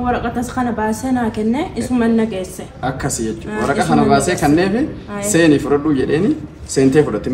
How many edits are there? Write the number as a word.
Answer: zero